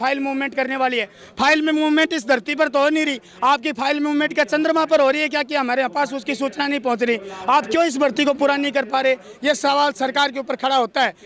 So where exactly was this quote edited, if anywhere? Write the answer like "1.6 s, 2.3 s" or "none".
none